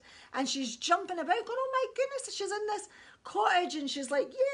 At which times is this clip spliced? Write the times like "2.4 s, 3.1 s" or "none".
none